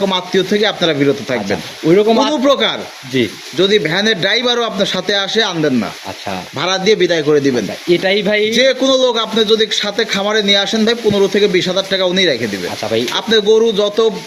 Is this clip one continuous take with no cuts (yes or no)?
yes